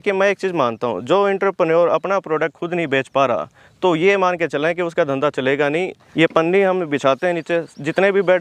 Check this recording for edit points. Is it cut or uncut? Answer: cut